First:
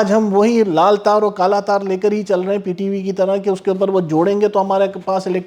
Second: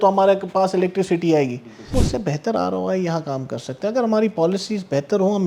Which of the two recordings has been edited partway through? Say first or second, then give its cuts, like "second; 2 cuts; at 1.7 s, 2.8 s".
second; 1 cut; at 1.9 s